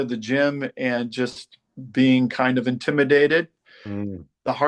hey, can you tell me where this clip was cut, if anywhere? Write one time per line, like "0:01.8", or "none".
none